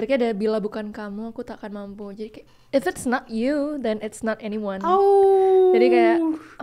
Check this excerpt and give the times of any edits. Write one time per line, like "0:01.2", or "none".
none